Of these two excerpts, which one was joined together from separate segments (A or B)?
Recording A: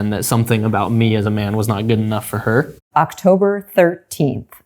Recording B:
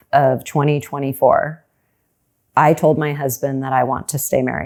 A